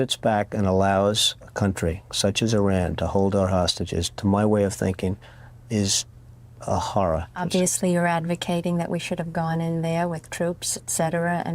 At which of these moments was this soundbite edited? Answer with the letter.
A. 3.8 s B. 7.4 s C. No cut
B